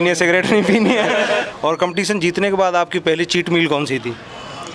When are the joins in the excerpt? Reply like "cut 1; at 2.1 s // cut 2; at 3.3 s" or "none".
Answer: cut 1; at 1.5 s